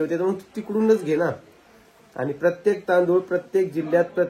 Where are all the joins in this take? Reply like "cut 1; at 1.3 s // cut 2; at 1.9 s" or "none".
none